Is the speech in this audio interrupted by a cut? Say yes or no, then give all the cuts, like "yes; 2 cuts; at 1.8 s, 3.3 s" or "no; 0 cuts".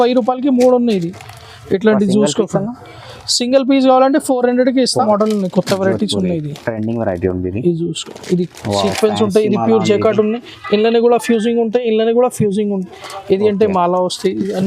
yes; 1 cut; at 5.0 s